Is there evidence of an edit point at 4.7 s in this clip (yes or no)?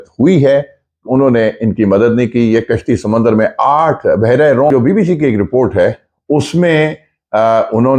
yes